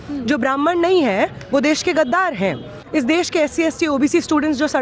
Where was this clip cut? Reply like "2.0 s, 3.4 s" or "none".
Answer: 2.7 s